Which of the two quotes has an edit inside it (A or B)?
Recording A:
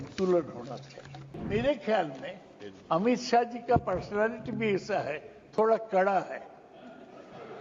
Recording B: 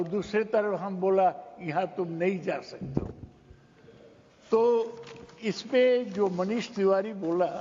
A